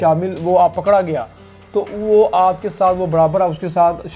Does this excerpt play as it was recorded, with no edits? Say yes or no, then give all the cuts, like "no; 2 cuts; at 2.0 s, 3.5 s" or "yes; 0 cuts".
yes; 0 cuts